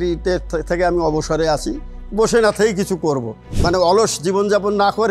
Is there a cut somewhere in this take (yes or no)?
yes